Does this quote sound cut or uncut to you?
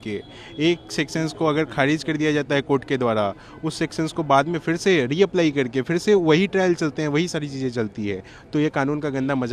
uncut